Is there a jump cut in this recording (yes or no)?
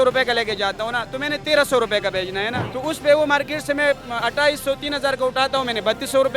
yes